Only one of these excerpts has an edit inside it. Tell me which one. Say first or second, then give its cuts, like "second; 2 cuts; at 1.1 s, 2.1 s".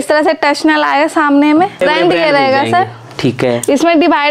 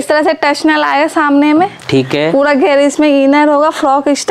first; 1 cut; at 1.8 s